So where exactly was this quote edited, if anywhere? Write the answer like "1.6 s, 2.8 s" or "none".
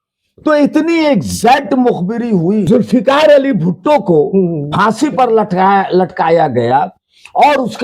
2.7 s